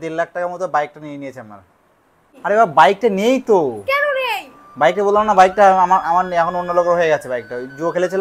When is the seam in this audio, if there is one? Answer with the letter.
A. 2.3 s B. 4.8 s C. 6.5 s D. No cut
A